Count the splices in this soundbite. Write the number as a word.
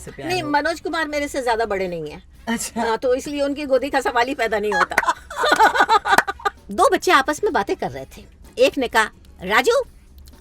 one